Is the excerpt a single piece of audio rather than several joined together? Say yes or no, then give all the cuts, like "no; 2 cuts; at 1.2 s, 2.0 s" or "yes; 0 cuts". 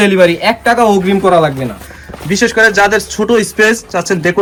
yes; 0 cuts